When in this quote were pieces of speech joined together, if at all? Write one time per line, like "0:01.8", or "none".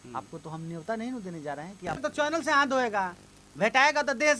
0:02.0